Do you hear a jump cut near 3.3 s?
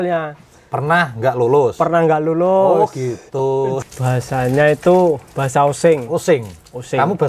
yes; 1 cut; at 3.3 s

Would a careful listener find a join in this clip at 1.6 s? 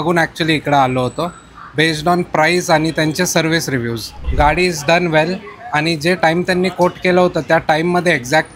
no; 1 cut; at 4.2 s

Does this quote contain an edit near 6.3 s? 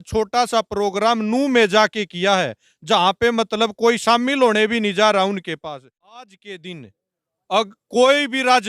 yes; 1 cut; at 6.3 s

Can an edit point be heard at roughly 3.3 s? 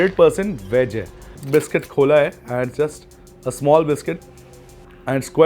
no; 1 cut; at 1.4 s

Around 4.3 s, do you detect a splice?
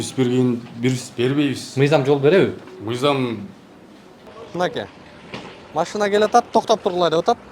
yes; 1 cut; at 4.3 s

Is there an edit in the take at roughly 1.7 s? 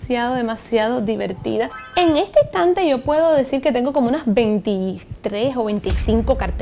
yes; 1 cut; at 1.7 s

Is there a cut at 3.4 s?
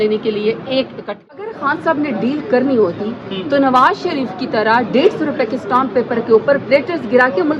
no; 1 cut; at 1.4 s

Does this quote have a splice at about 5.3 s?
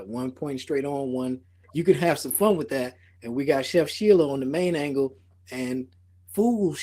no; 1 cut; at 1.6 s

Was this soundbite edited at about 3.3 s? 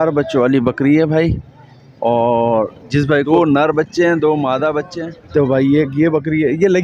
yes; 2 cuts; at 3.3 s, 5.0 s

